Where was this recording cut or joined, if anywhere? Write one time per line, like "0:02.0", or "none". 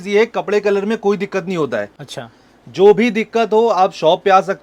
none